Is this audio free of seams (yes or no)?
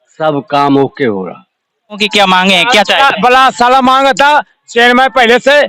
no